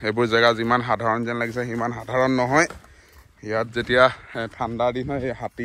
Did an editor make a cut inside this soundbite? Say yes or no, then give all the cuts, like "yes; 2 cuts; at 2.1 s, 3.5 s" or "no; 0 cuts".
no; 0 cuts